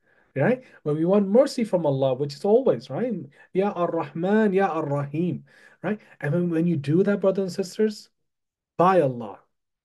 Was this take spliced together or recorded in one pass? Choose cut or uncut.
uncut